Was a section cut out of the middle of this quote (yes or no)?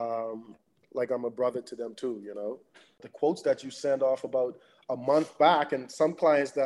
yes